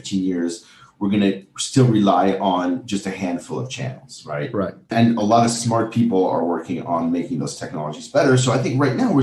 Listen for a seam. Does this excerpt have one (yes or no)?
yes